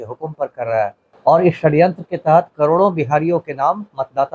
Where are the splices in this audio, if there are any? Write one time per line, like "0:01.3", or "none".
0:01.1